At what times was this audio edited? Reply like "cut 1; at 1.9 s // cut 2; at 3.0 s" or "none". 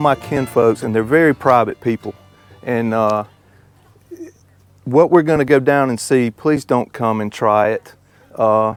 none

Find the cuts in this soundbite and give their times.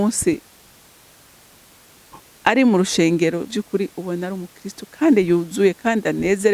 none

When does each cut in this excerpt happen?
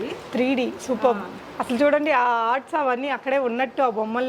none

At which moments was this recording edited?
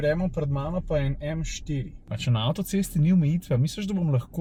none

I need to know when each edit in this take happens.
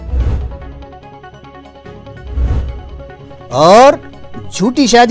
cut 1; at 3.1 s

